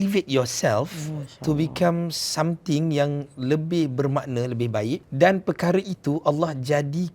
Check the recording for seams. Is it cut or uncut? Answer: cut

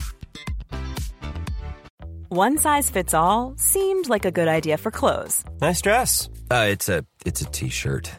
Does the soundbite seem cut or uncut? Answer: cut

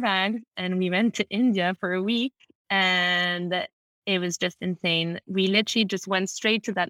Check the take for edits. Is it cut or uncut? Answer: uncut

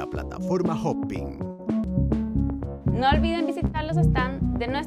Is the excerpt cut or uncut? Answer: cut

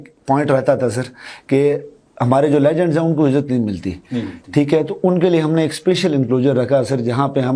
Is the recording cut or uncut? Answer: uncut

